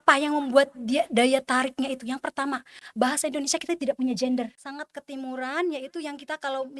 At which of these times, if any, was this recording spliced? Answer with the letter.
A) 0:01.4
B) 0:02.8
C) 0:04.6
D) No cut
C